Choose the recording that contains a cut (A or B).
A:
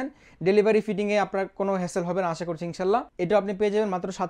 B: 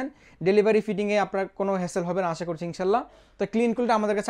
A